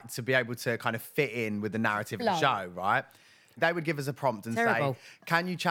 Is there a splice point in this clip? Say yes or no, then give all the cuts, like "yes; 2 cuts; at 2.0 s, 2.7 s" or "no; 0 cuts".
yes; 1 cut; at 3.5 s